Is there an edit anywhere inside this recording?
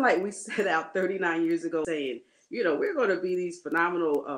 yes; 1 cut; at 1.9 s

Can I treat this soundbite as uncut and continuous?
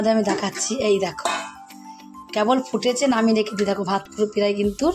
yes; 0 cuts

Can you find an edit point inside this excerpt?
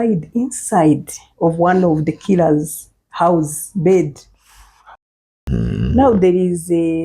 yes; 1 cut; at 5.5 s

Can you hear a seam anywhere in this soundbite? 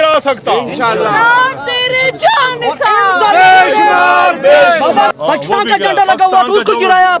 yes; 1 cut; at 5.1 s

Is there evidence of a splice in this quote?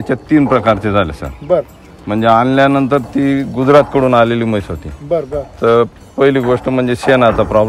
no; 0 cuts

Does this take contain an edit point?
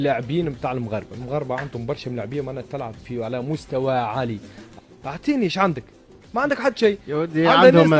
yes; 1 cut; at 4.7 s

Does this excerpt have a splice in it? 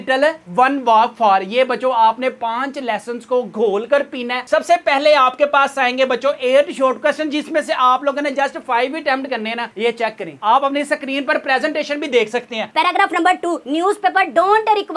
yes; 2 cuts; at 4.4 s, 12.7 s

